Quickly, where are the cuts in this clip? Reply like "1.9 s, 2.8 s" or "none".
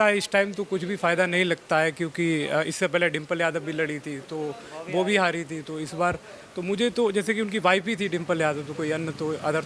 none